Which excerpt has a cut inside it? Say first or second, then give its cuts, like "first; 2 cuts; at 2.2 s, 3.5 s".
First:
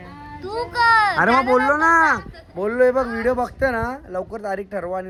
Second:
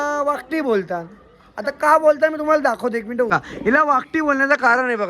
second; 1 cut; at 3.3 s